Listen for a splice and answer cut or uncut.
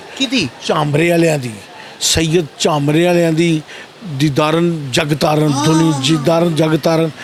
uncut